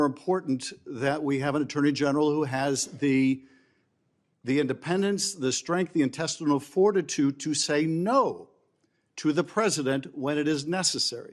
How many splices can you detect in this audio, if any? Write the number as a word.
zero